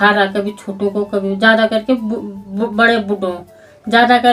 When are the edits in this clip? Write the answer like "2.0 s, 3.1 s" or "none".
none